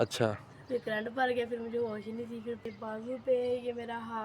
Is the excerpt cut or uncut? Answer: cut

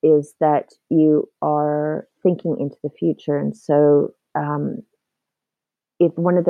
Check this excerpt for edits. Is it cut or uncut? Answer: uncut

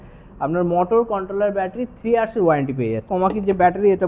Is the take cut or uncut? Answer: cut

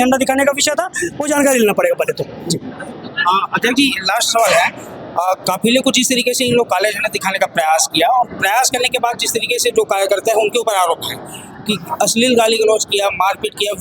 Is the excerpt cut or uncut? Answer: uncut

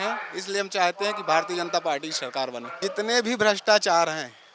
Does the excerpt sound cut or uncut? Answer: cut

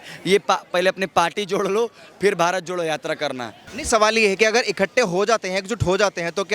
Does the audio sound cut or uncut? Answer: cut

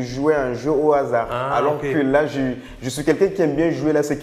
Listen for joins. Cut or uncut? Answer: uncut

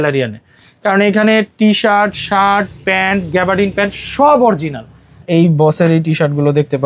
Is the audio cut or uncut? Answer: cut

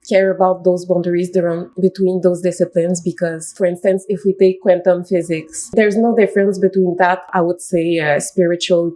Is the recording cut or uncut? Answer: cut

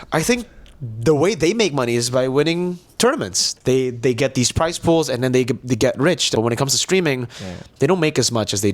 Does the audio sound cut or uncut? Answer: cut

